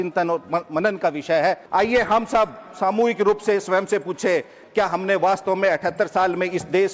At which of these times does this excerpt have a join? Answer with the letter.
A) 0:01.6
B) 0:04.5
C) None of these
A